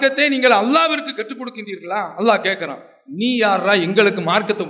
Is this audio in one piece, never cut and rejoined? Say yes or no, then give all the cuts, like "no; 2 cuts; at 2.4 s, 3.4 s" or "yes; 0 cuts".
yes; 0 cuts